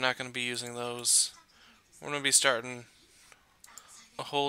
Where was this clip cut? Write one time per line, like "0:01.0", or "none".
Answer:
0:01.5